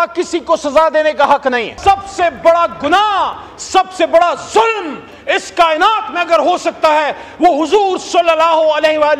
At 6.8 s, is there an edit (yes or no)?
no